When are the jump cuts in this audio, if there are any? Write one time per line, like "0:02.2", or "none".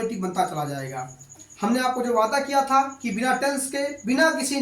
0:01.3